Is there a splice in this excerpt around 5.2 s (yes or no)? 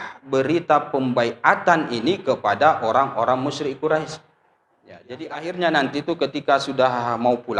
yes